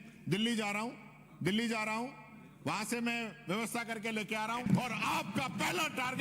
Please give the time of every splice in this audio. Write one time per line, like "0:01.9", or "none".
0:04.6